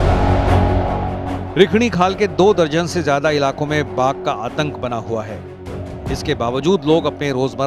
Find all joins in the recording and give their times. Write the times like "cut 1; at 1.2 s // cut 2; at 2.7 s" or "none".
cut 1; at 0.9 s